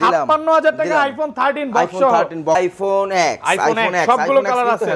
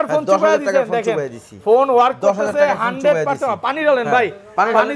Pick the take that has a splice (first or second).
first